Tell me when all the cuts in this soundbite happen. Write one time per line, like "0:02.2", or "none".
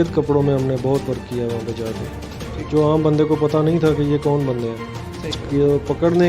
0:05.4